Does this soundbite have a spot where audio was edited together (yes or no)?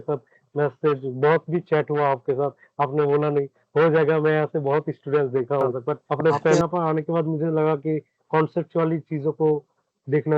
yes